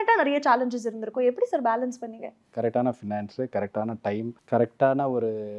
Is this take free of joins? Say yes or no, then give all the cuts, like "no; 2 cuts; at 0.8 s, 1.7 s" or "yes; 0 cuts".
no; 2 cuts; at 2.4 s, 4.4 s